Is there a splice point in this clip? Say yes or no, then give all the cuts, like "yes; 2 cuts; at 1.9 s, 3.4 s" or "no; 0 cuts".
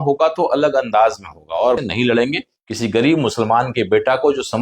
yes; 1 cut; at 1.8 s